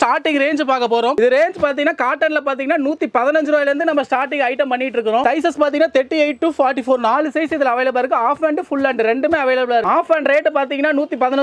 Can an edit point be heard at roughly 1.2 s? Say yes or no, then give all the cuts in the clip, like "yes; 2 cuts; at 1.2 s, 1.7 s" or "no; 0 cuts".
no; 0 cuts